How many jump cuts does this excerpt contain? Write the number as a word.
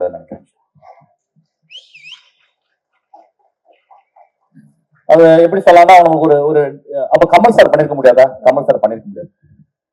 zero